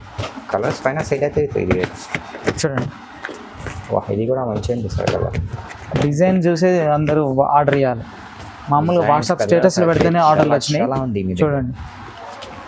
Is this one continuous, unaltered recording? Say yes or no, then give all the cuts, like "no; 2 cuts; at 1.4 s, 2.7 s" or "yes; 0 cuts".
yes; 0 cuts